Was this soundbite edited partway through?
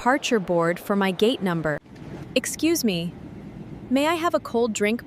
yes; 1 cut; at 1.9 s

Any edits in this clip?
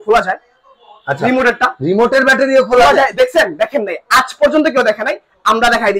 no; 0 cuts

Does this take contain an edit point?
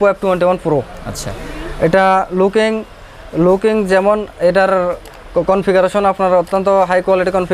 no; 0 cuts

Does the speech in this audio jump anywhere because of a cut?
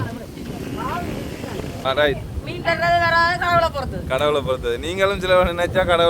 yes; 1 cut; at 1.8 s

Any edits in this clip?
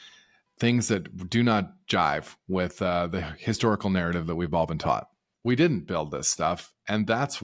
yes; 1 cut; at 5.2 s

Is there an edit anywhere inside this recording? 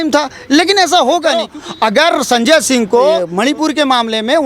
yes; 2 cuts; at 1.6 s, 3.3 s

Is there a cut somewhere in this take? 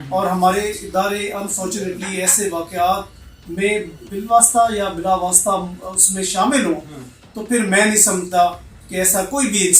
yes; 1 cut; at 4.0 s

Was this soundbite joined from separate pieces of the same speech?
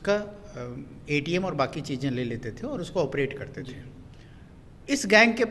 no; 0 cuts

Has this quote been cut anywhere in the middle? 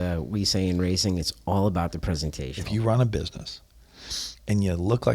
yes; 1 cut; at 2.5 s

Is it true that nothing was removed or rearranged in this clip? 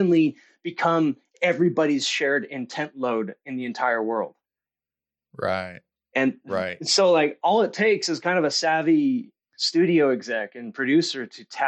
yes; 0 cuts

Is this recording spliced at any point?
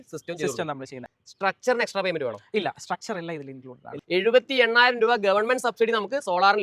yes; 1 cut; at 3.8 s

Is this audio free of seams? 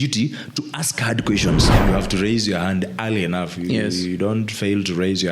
no; 1 cut; at 1.7 s

